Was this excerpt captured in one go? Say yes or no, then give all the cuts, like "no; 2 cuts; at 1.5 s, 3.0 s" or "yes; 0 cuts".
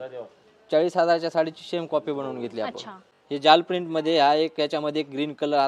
no; 1 cut; at 3.0 s